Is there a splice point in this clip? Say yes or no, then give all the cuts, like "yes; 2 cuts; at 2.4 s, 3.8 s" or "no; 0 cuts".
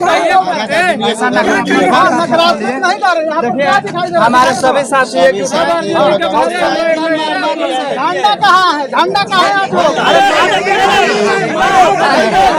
no; 0 cuts